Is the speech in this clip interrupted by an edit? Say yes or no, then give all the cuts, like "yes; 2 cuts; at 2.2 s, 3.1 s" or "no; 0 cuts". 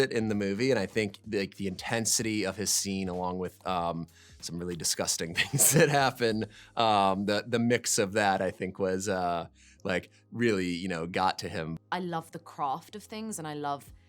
yes; 1 cut; at 11.7 s